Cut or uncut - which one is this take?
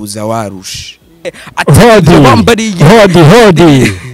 cut